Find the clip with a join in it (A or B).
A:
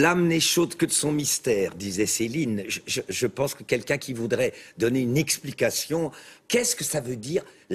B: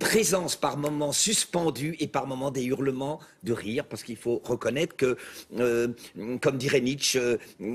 B